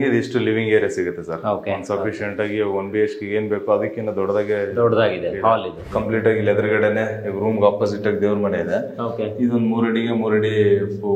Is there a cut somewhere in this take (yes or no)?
yes